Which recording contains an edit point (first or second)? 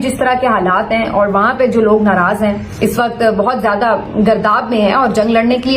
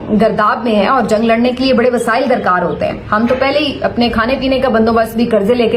first